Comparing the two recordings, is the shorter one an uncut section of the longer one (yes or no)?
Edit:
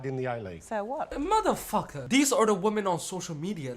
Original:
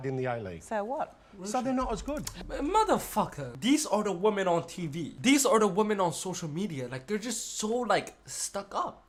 no